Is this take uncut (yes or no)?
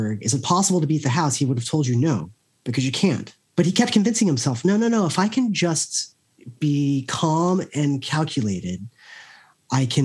no